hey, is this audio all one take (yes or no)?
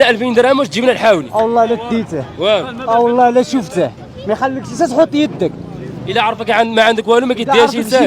yes